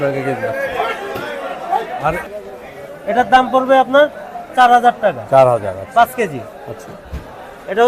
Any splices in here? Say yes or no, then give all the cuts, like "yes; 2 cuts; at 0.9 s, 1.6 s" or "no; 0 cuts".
yes; 1 cut; at 2.2 s